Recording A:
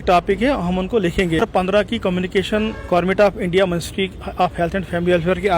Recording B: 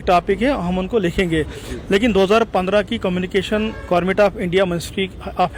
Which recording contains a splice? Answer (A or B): A